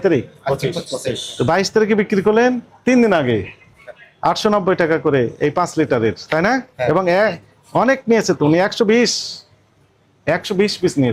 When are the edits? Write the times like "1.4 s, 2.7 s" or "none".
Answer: none

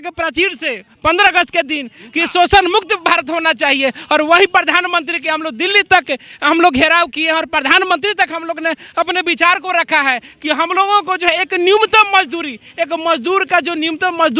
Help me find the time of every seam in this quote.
none

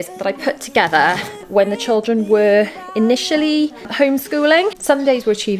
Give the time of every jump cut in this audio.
1.4 s, 3.9 s, 4.8 s

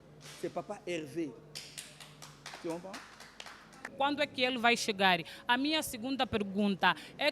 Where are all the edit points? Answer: 3.8 s

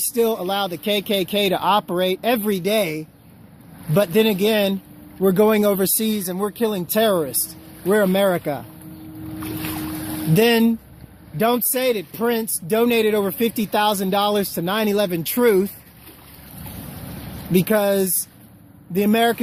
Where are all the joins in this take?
6.8 s

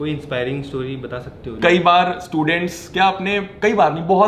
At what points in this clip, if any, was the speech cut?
1.5 s

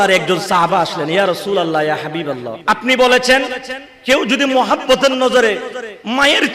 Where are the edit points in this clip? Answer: 2.5 s

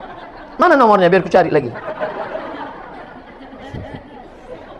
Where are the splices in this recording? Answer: none

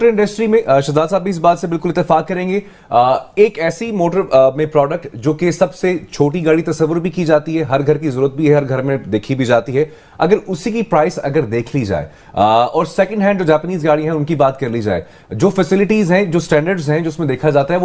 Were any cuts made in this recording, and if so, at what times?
none

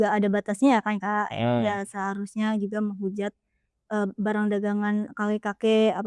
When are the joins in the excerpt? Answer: none

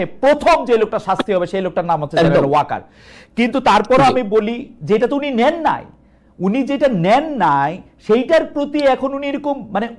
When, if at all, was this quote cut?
none

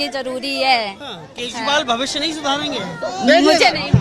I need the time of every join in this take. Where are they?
none

